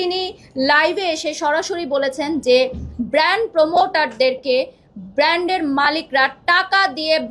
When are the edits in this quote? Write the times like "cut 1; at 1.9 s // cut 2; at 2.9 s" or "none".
none